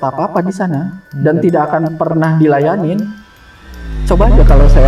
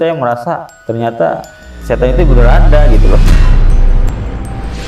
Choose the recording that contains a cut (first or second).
first